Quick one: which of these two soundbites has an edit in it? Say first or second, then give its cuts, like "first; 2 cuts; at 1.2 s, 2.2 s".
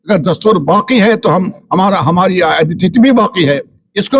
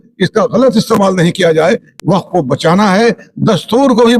second; 1 cut; at 1.9 s